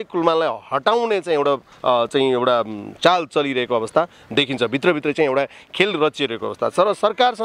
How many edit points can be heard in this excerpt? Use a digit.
0